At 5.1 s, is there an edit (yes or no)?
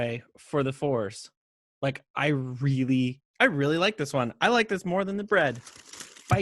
no